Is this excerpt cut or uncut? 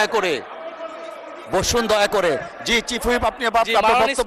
uncut